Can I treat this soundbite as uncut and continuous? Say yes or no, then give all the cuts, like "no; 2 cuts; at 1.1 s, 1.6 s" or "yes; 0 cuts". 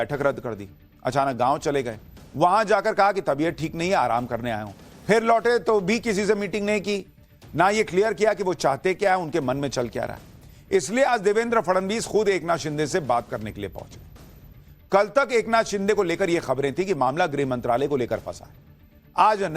no; 1 cut; at 3.7 s